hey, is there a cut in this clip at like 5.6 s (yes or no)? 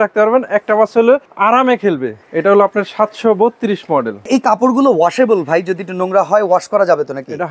no